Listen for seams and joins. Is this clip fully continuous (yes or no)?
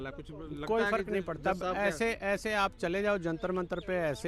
yes